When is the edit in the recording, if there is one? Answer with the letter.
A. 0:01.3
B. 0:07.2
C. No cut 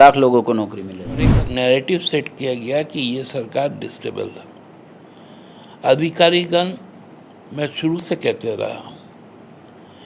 A